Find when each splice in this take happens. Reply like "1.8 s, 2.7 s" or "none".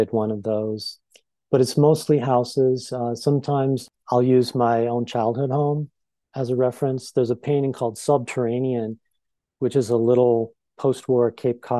10.6 s